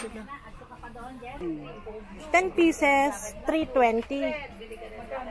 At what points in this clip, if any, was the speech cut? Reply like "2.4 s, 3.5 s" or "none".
1.4 s